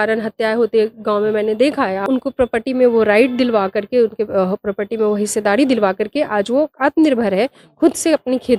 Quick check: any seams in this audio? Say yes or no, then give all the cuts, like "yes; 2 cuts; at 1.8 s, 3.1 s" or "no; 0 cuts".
yes; 1 cut; at 2.0 s